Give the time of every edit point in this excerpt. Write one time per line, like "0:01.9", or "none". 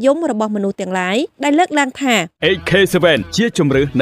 0:02.3

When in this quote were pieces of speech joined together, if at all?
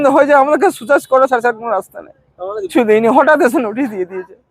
0:02.7

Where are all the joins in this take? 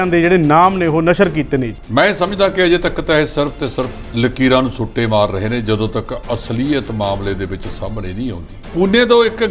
0:01.8
0:04.0
0:08.5

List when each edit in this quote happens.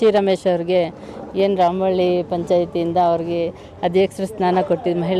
none

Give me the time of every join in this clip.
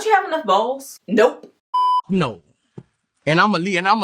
0:00.9
0:01.5

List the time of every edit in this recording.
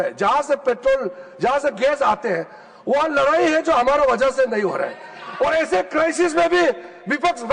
none

